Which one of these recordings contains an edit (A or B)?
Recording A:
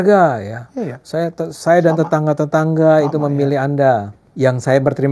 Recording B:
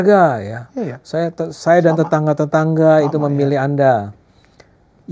A